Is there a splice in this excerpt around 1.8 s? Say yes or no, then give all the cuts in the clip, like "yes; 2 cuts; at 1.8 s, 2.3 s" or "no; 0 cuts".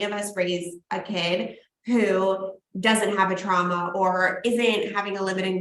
no; 0 cuts